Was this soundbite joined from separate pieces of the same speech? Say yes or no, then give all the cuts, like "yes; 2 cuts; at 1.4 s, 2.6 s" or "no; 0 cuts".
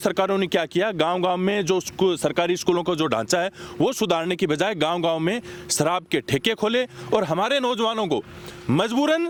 no; 0 cuts